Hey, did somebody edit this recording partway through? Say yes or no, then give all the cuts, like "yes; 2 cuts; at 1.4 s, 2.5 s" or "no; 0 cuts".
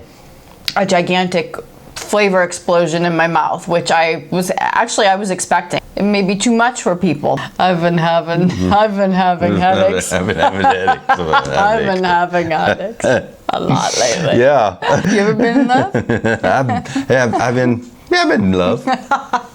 yes; 3 cuts; at 5.7 s, 7.4 s, 15.0 s